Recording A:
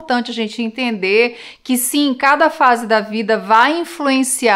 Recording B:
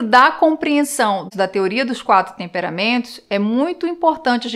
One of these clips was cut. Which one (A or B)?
B